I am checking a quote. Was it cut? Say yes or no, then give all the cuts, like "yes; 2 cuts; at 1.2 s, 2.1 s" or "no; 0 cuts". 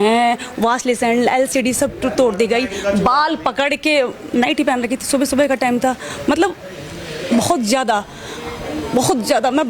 no; 0 cuts